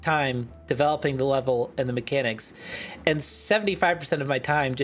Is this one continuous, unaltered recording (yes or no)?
yes